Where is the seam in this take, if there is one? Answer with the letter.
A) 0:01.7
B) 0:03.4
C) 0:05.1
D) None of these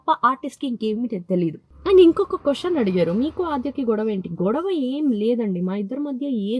A